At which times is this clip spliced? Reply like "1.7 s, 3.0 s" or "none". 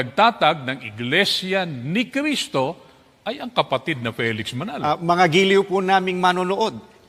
4.7 s

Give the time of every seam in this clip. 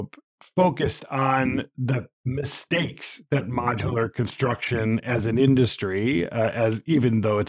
none

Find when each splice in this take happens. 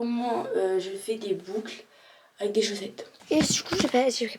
3.1 s

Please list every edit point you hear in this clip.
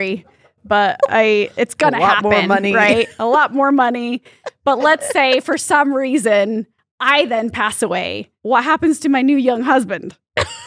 8.3 s

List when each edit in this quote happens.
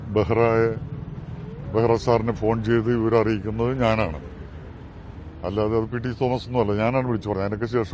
none

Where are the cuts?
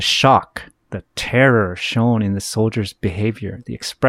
none

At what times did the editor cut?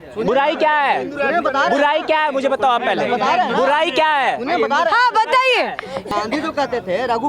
6.1 s

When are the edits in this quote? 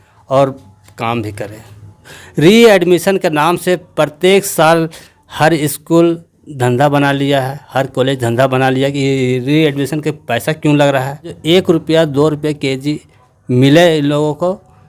2.2 s, 11.4 s

